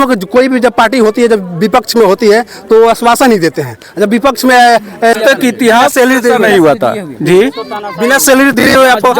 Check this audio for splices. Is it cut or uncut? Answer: cut